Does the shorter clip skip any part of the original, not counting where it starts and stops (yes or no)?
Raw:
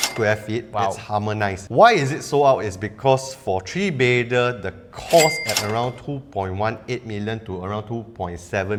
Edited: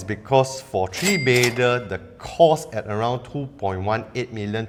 no